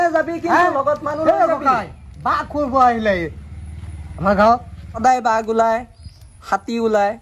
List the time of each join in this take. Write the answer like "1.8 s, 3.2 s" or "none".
4.8 s